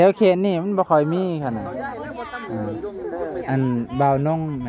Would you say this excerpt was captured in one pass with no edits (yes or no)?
no